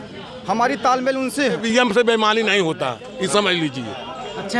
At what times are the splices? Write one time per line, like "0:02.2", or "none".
0:01.6

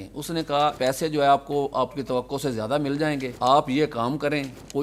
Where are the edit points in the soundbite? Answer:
none

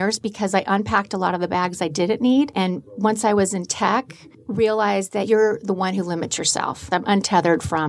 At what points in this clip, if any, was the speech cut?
0:02.5
0:05.2
0:06.8

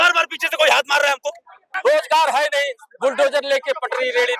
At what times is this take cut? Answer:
0:01.7

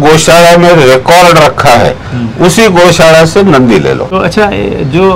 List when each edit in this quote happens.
0:04.1

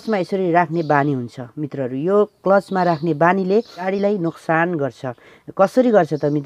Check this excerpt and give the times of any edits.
0:03.9

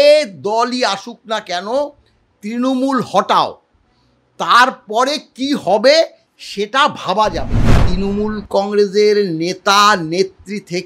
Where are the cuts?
0:07.9

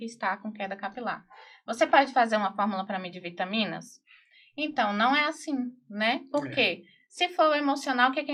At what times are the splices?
none

